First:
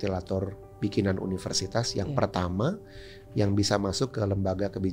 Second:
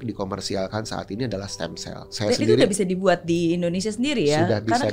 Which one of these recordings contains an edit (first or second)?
second